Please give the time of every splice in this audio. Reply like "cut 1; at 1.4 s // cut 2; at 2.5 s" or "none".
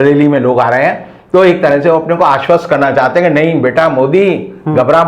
none